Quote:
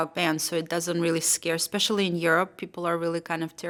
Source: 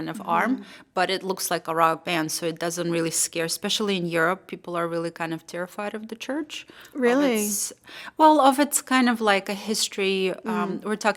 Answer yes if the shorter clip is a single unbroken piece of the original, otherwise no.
yes